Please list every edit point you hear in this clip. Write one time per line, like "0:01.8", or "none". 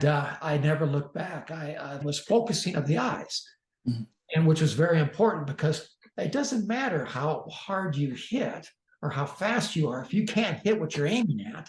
0:02.0